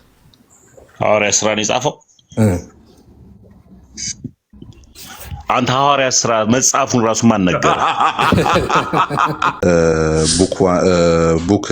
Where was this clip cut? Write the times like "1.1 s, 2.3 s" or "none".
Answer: 9.4 s